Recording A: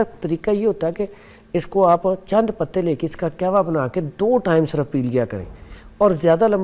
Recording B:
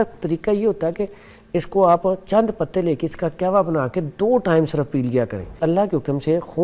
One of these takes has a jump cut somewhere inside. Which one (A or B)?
B